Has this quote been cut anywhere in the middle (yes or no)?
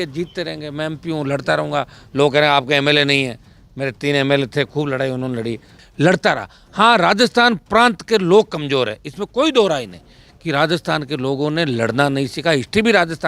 yes